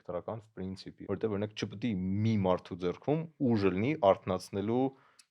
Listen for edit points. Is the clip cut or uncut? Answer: cut